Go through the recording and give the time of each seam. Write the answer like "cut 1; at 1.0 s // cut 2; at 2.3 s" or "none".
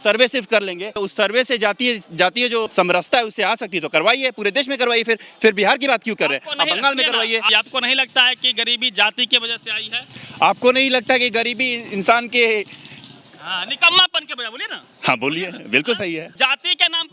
cut 1; at 1.0 s // cut 2; at 2.7 s // cut 3; at 7.5 s // cut 4; at 16.3 s